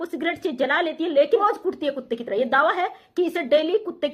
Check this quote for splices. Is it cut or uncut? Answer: cut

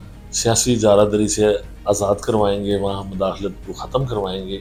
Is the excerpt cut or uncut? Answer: uncut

